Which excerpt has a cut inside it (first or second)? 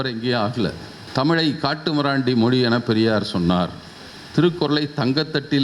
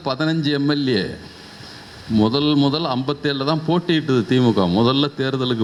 first